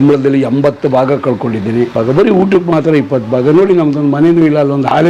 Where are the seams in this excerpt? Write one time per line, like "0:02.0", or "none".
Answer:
0:01.9